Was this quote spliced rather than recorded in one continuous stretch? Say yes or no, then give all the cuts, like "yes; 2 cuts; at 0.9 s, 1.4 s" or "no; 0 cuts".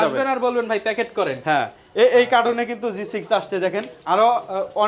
no; 0 cuts